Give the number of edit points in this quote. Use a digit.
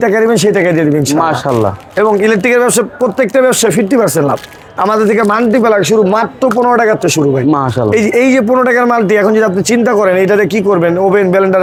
0